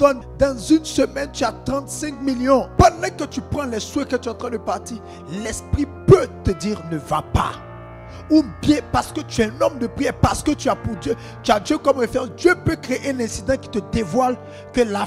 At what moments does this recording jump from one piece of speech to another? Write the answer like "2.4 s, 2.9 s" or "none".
2.7 s

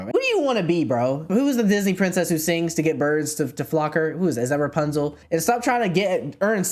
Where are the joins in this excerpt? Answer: 1.3 s, 5.2 s

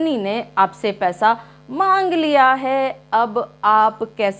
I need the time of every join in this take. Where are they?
none

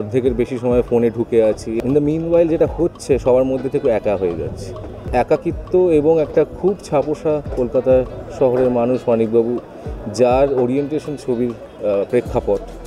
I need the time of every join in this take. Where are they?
1.7 s, 5.0 s

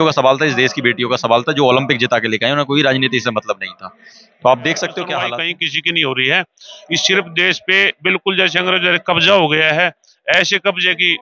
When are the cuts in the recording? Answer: 5.4 s

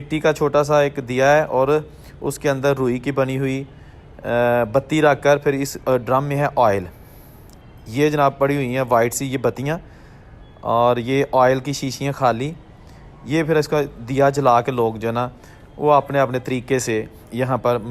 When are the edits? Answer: none

